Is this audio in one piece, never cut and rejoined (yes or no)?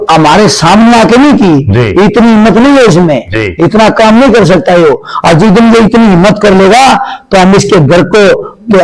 yes